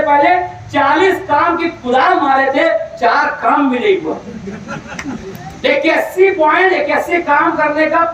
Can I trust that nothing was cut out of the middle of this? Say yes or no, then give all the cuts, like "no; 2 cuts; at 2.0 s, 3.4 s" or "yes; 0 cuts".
yes; 0 cuts